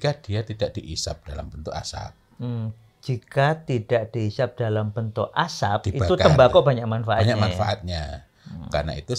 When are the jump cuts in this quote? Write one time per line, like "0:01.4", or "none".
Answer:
none

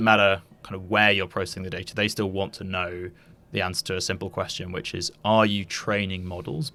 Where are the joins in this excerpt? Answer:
none

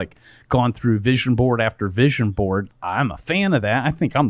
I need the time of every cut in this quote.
0:02.7

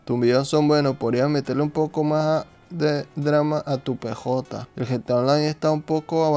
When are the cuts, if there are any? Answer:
none

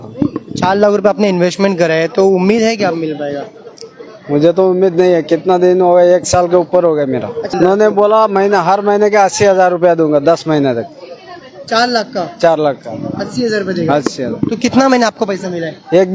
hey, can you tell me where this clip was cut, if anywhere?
0:07.4

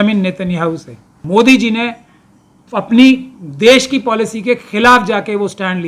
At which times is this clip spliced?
0:01.2

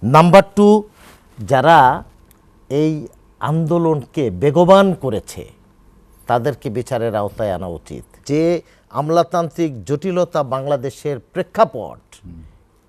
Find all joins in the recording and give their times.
0:08.2

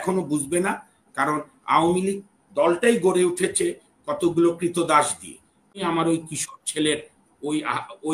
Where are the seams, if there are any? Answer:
0:05.8

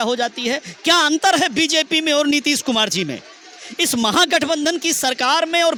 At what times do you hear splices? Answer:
none

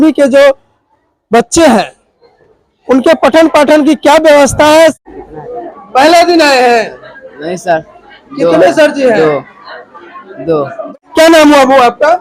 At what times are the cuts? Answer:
0:05.0
0:10.9

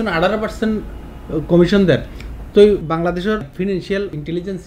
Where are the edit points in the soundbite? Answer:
none

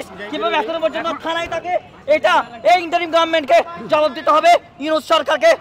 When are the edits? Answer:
none

